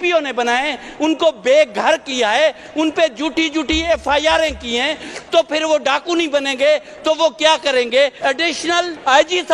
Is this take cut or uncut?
cut